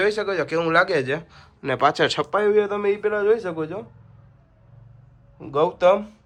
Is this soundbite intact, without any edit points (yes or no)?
yes